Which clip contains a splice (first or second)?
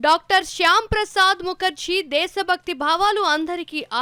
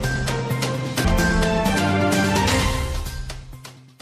second